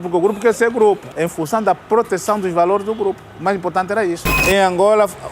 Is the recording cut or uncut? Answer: cut